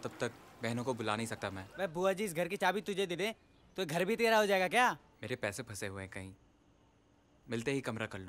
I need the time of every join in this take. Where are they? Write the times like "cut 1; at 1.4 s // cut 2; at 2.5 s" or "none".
cut 1; at 1.6 s // cut 2; at 5.1 s

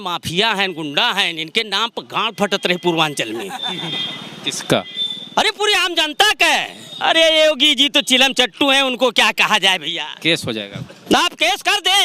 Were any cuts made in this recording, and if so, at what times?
cut 1; at 6.9 s

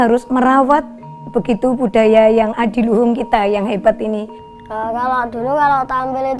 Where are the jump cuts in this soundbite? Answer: cut 1; at 4.4 s

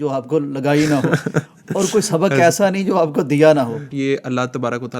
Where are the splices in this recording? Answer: cut 1; at 3.9 s

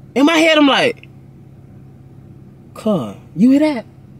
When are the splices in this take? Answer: none

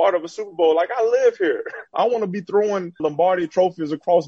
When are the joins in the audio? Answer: cut 1; at 1.9 s // cut 2; at 3.0 s

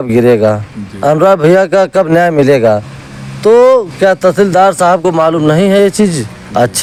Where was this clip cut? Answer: none

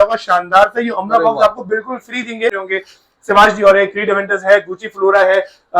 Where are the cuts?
cut 1; at 2.6 s

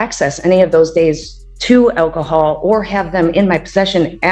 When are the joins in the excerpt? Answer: none

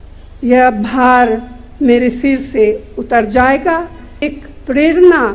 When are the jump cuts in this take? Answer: cut 1; at 4.3 s

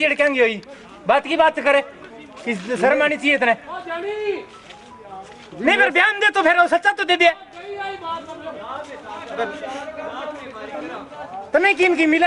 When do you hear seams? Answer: none

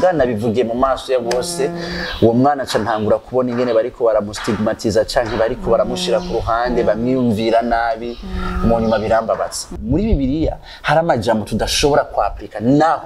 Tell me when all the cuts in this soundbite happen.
cut 1; at 9.7 s

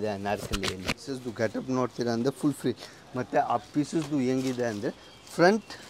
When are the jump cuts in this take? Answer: cut 1; at 1.2 s

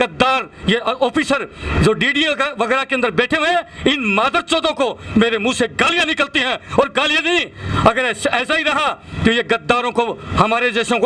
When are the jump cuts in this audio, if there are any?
none

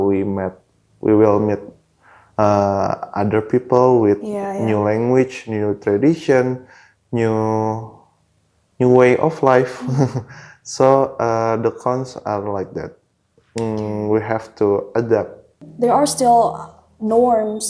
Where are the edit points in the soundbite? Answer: cut 1; at 15.6 s

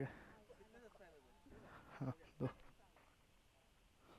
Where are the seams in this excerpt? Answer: cut 1; at 1.4 s

